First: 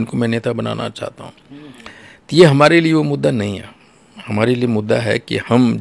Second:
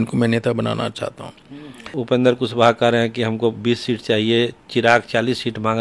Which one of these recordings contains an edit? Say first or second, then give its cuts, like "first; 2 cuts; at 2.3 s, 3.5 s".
second; 1 cut; at 1.9 s